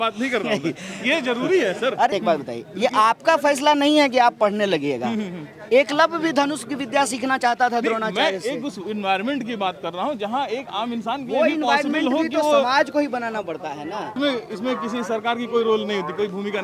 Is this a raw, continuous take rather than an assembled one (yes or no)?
no